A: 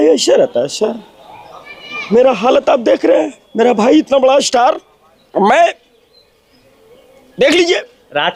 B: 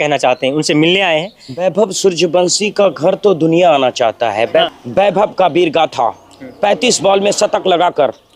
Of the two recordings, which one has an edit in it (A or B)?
B